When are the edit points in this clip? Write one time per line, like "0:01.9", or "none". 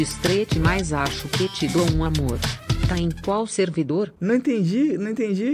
none